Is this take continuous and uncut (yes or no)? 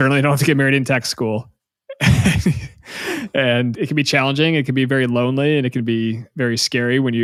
yes